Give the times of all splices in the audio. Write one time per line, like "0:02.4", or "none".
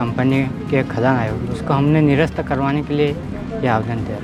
none